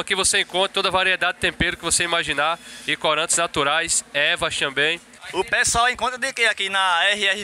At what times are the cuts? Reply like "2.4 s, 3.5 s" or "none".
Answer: 5.1 s